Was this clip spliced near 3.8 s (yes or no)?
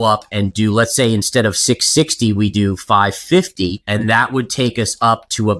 yes